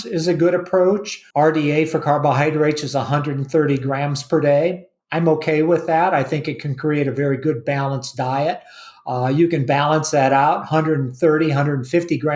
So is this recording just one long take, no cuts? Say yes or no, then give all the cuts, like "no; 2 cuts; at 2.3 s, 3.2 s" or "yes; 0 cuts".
no; 1 cut; at 1.2 s